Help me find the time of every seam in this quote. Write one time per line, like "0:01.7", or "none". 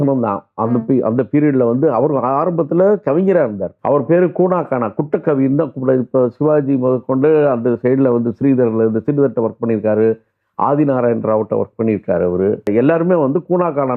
0:03.7
0:12.7